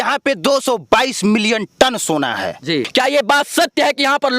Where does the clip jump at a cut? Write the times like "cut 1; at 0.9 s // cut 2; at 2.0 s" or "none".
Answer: cut 1; at 2.9 s

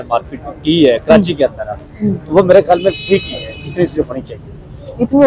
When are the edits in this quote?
none

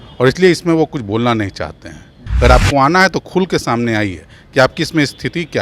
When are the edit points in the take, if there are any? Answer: cut 1; at 2.2 s

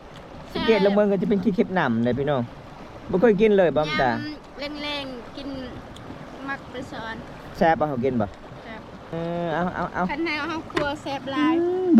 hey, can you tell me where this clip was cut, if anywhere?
cut 1; at 9.1 s

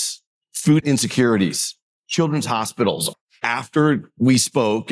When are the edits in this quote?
cut 1; at 0.7 s // cut 2; at 3.1 s

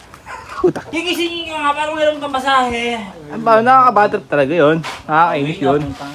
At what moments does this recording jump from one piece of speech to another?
cut 1; at 0.9 s

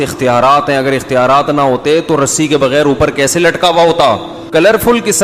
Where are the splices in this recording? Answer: cut 1; at 4.3 s

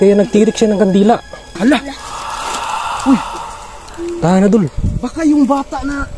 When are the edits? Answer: none

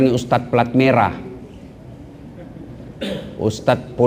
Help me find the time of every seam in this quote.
none

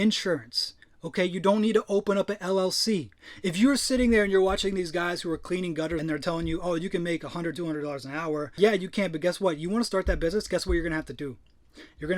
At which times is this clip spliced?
cut 1; at 6.0 s // cut 2; at 8.5 s

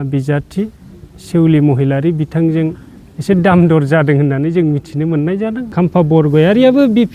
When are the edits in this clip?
cut 1; at 5.7 s

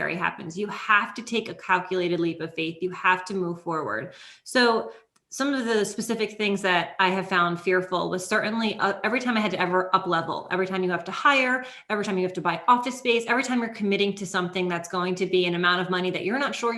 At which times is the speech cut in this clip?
none

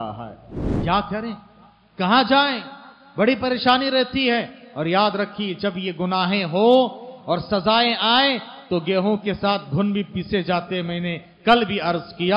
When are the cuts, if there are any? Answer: none

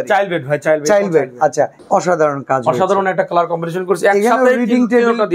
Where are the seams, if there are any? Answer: cut 1; at 1.8 s

